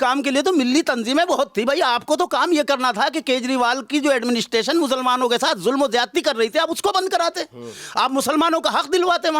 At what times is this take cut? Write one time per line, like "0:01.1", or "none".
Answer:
none